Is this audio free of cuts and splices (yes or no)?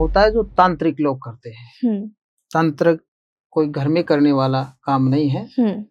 yes